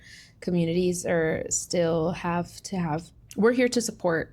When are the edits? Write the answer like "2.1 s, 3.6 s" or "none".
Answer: 3.1 s